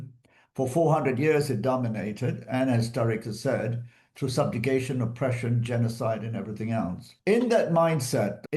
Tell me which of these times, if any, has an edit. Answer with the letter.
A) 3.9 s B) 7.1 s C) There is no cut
B